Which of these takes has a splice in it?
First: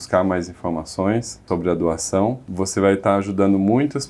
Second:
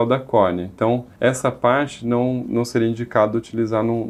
first; 2 cuts; at 1.4 s, 2.5 s

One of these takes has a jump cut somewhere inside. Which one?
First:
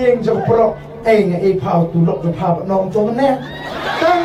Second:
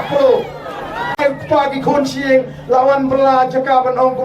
second; 1 cut; at 1.2 s

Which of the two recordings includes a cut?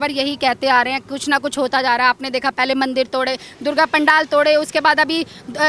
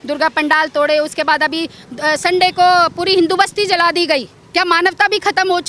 second; 1 cut; at 4.4 s

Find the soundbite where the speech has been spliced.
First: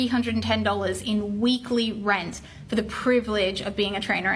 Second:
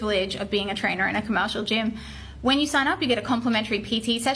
second; 1 cut; at 2.0 s

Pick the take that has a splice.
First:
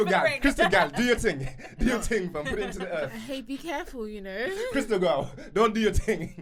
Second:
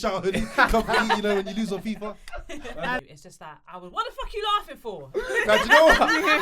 second; 1 cut; at 3.0 s

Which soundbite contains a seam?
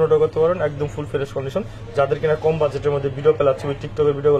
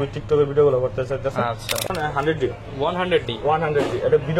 second; 1 cut; at 1.9 s

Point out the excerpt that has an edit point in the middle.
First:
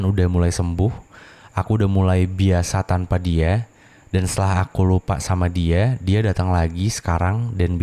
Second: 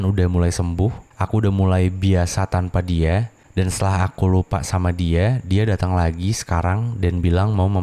second; 2 cuts; at 1.1 s, 3.4 s

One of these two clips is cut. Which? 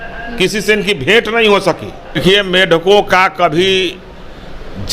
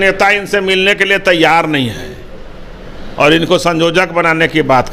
first; 1 cut; at 2.2 s

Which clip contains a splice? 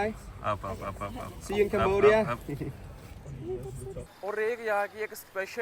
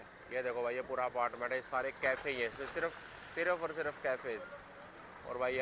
first; 1 cut; at 4.0 s

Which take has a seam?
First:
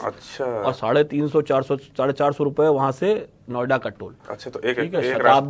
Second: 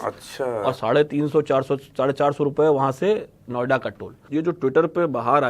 second; 1 cut; at 4.2 s

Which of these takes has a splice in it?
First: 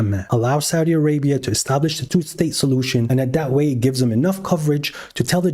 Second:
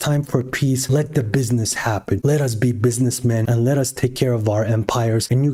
first; 1 cut; at 3.1 s

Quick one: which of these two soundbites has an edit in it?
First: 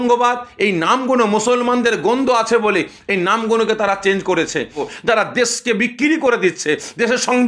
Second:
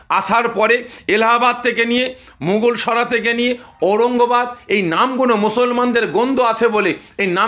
first; 1 cut; at 4.8 s

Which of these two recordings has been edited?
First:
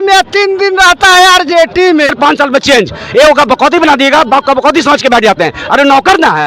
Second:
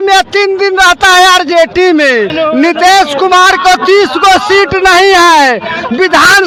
first; 1 cut; at 2.1 s

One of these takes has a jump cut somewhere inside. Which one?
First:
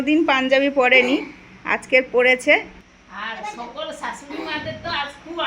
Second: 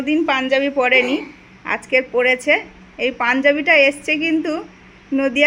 first; 1 cut; at 2.8 s

